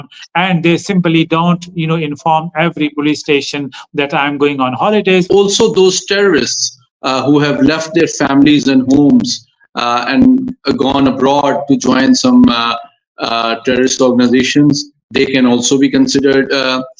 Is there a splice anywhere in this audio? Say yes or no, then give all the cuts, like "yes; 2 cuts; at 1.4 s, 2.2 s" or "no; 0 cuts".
yes; 1 cut; at 5.3 s